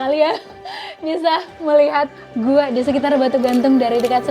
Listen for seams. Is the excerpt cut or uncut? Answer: cut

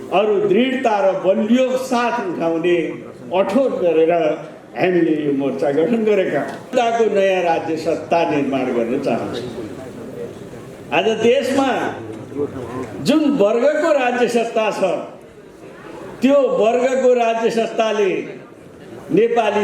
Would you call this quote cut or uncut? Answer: cut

